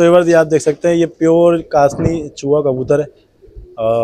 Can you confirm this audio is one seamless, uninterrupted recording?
yes; 0 cuts

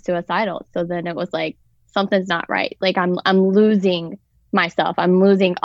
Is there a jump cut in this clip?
no; 0 cuts

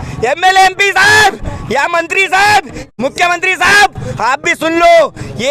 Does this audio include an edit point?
yes; 1 cut; at 2.8 s

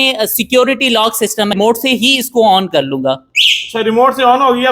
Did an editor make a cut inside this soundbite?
yes; 1 cut; at 1.6 s

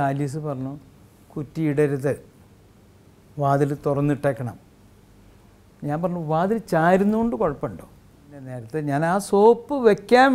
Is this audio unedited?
no; 1 cut; at 8.6 s

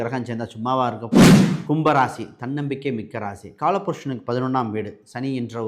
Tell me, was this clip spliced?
yes; 2 cuts; at 1.0 s, 1.6 s

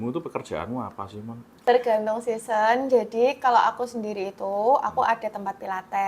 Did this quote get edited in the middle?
yes; 1 cut; at 1.6 s

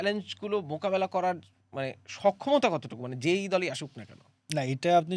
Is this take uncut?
yes; 0 cuts

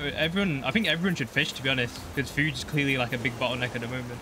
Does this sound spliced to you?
no; 0 cuts

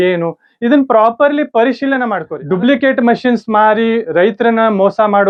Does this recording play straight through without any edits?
yes; 0 cuts

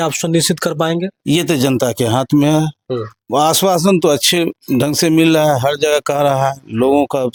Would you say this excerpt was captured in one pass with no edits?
yes; 0 cuts

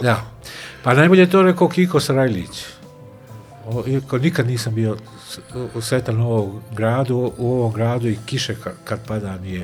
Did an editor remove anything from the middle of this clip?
no; 0 cuts

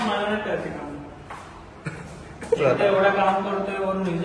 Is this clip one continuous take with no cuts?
no; 1 cut; at 2.6 s

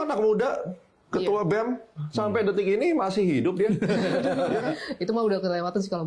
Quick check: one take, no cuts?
yes; 0 cuts

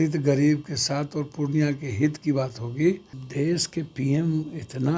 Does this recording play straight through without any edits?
no; 1 cut; at 3.2 s

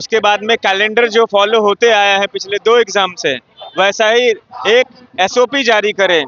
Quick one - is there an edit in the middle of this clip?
no; 0 cuts

